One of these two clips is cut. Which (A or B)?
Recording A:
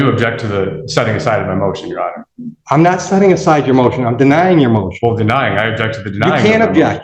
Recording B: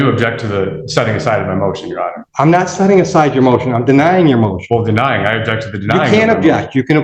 B